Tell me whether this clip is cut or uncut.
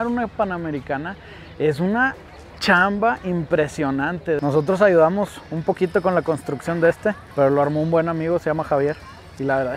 cut